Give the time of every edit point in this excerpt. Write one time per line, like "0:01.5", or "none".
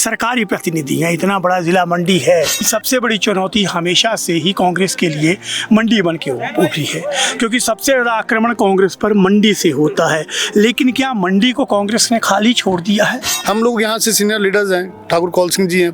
0:02.7
0:13.3